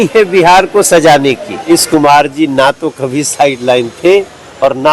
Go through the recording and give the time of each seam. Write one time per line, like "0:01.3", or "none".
0:01.7

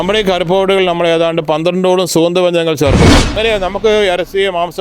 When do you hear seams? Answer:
0:03.3

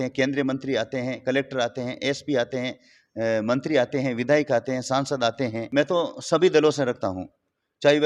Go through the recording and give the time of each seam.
0:05.7

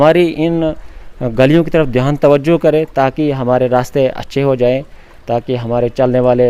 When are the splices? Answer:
none

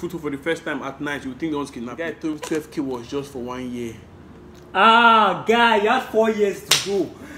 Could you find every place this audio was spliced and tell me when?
0:02.3

